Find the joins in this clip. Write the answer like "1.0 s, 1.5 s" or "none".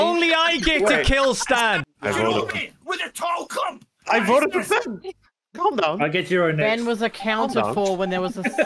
1.9 s